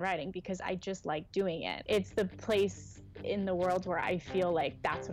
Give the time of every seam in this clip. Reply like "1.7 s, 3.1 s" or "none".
1.7 s